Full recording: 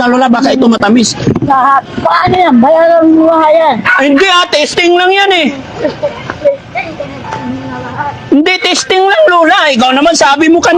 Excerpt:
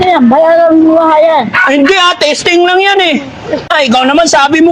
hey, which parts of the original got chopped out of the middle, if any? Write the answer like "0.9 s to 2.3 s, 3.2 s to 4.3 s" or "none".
6.0 s to 9.6 s